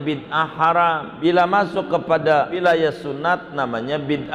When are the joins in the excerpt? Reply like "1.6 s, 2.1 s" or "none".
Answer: 1.1 s, 2.6 s